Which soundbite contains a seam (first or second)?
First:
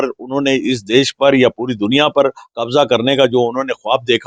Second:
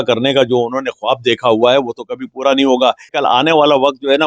second